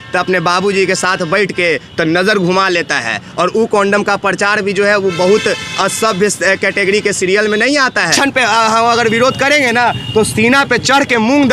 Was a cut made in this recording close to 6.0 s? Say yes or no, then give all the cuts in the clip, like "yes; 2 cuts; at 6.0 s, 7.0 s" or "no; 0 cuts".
no; 1 cut; at 8.1 s